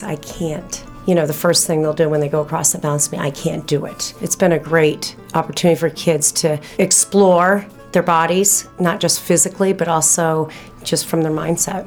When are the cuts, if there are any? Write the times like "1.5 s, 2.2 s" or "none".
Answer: 0.9 s, 4.2 s, 5.1 s, 6.6 s